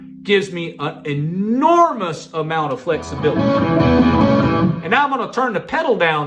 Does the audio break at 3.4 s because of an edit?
yes; 1 cut; at 3.4 s

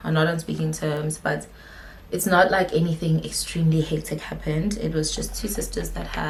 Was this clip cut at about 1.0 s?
no; 0 cuts

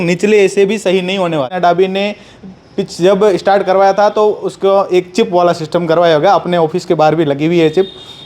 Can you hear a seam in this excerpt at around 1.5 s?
yes; 1 cut; at 1.5 s

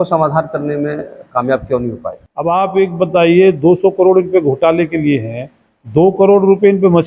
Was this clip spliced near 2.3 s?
yes; 1 cut; at 2.3 s

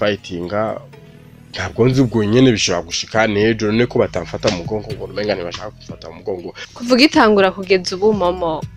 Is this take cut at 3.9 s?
no; 1 cut; at 6.6 s

